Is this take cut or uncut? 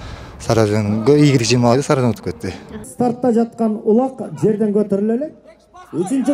cut